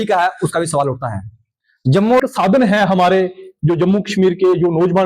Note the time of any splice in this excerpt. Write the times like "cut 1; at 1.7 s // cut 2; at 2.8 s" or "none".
cut 1; at 2.2 s